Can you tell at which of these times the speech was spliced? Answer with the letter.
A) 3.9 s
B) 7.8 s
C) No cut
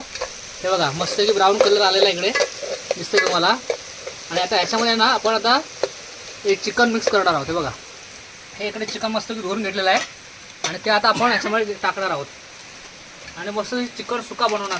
C